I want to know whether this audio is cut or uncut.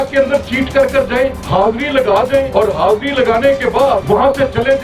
cut